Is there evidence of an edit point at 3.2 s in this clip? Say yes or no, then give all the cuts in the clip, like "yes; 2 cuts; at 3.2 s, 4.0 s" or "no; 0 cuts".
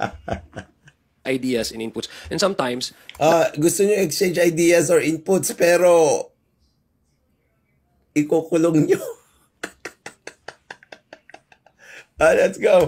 no; 1 cut; at 1.2 s